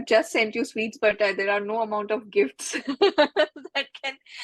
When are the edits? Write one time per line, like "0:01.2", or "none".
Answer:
none